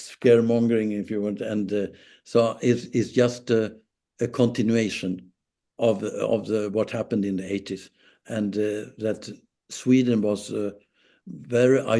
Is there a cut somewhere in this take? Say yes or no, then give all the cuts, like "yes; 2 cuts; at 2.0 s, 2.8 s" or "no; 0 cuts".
no; 0 cuts